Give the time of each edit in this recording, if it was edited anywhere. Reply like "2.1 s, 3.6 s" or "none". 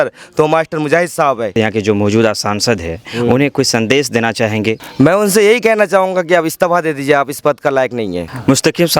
1.5 s, 4.8 s